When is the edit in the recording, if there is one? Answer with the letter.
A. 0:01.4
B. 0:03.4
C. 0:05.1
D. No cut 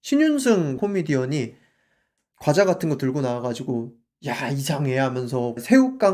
D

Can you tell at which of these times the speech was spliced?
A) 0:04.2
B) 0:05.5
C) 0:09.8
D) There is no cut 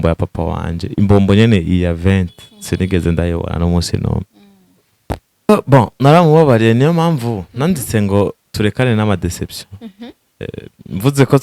B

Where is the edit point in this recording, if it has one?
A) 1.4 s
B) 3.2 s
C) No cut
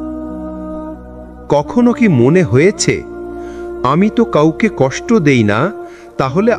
A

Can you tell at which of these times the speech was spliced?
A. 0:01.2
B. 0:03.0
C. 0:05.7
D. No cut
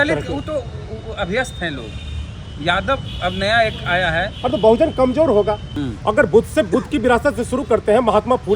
C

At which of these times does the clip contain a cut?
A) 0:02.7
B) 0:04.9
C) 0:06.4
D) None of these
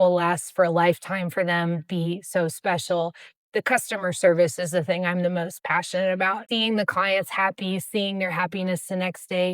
C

